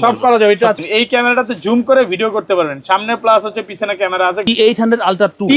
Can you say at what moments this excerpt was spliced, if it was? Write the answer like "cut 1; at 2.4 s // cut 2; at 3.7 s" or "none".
cut 1; at 0.8 s // cut 2; at 4.5 s